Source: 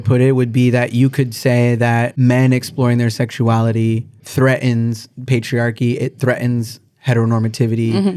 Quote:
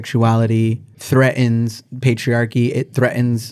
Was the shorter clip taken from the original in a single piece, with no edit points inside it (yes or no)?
yes